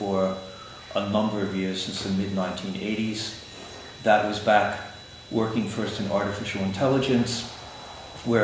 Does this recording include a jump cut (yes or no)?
no